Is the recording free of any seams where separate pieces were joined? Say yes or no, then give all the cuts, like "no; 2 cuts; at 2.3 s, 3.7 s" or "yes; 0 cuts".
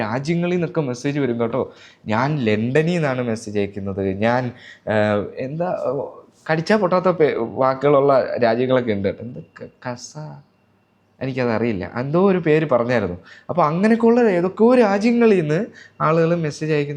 yes; 0 cuts